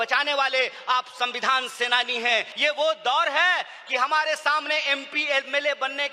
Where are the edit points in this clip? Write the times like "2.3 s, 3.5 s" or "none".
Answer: 2.5 s